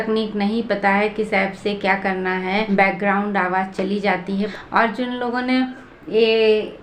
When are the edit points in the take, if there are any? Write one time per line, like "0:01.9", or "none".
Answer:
0:02.7
0:04.5